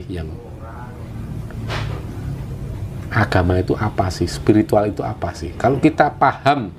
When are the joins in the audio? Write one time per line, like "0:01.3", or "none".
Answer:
none